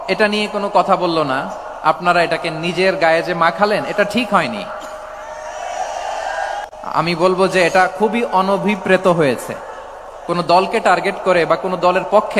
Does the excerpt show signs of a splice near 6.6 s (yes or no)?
yes